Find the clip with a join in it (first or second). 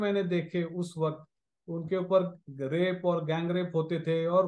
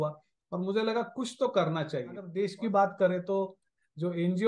second